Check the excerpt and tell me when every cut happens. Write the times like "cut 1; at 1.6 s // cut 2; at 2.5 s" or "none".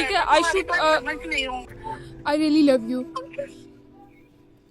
cut 1; at 1.7 s // cut 2; at 3.4 s